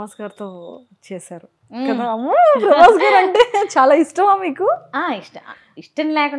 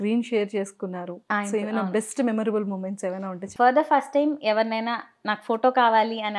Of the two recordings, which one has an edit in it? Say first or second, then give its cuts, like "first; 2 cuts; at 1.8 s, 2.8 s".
second; 1 cut; at 3.4 s